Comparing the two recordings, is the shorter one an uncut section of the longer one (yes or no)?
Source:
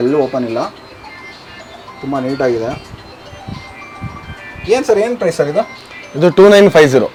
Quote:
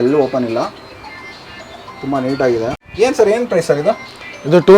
no